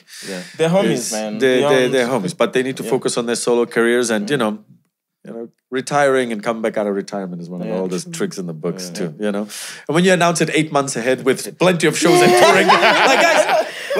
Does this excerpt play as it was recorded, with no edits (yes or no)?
yes